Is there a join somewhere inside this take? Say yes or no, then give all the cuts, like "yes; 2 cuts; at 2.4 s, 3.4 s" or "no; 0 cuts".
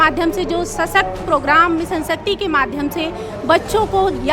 no; 0 cuts